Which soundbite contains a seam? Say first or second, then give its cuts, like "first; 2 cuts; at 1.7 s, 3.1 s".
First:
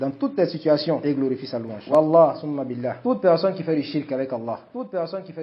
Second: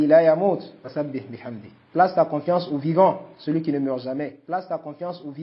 first; 1 cut; at 1.7 s